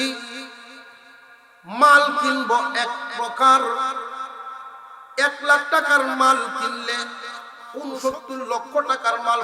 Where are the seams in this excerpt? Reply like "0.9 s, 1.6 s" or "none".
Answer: 7.7 s